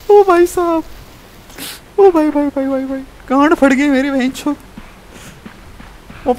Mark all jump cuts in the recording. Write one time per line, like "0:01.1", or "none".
none

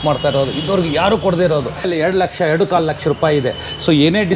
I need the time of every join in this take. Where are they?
0:01.9

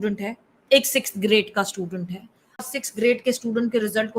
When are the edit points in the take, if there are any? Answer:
0:02.6

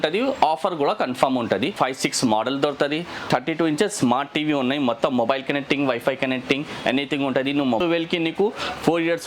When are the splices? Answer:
0:01.7
0:03.2
0:07.8

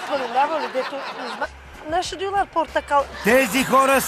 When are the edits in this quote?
none

